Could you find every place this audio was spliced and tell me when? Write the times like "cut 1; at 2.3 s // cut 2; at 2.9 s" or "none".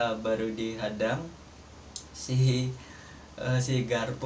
none